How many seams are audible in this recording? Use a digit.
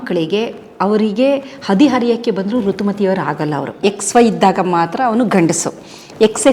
1